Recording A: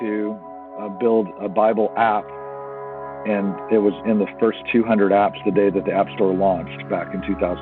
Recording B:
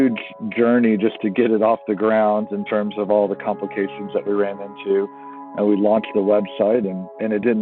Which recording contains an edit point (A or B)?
A